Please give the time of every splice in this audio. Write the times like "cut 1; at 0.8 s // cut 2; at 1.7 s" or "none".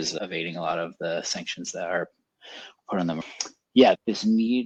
none